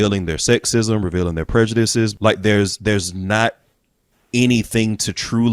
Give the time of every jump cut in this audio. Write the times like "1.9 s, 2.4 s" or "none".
2.1 s